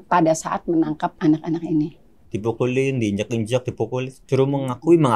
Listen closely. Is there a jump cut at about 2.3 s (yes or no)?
yes